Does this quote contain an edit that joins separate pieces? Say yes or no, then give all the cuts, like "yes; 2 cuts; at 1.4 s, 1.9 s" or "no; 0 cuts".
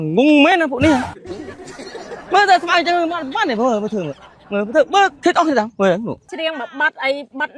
yes; 1 cut; at 6.3 s